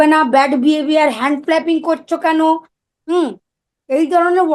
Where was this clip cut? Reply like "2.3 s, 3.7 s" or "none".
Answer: none